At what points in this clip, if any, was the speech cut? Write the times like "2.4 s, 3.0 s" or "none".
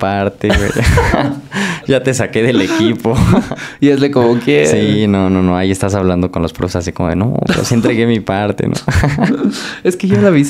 none